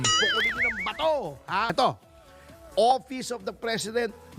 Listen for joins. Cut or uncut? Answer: cut